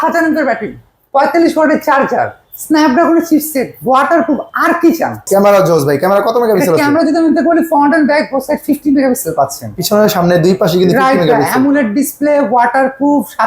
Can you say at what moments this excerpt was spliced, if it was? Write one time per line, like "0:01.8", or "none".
0:05.2